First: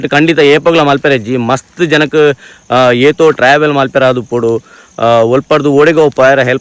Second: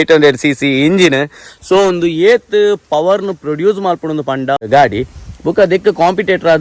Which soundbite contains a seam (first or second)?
second